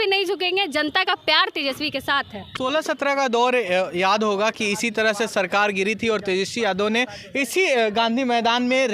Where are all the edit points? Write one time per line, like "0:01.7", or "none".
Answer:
0:02.5